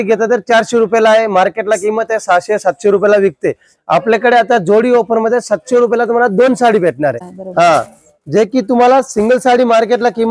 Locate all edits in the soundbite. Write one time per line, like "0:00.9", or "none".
0:07.2